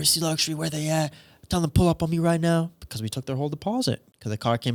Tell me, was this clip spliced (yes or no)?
no